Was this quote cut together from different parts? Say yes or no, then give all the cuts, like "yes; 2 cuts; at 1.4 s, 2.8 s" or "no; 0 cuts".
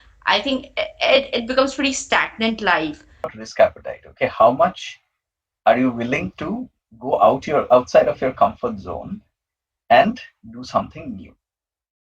yes; 1 cut; at 3.3 s